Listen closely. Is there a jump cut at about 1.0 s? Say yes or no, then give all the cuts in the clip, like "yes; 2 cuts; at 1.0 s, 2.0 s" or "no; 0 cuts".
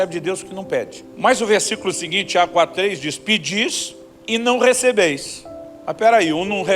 yes; 1 cut; at 1.0 s